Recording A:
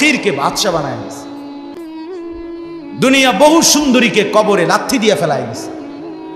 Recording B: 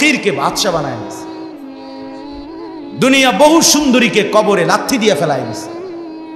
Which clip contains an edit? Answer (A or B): A